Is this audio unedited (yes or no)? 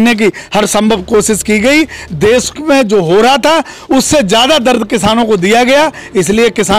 yes